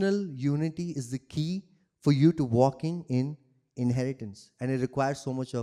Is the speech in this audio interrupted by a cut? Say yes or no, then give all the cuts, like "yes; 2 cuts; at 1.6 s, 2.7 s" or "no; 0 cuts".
no; 0 cuts